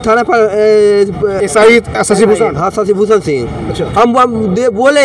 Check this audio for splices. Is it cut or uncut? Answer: cut